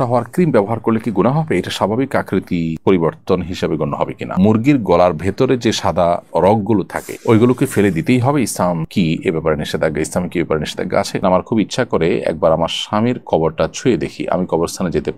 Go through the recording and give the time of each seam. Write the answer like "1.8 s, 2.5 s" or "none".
4.3 s, 11.2 s